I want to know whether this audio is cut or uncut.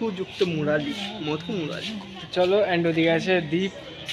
uncut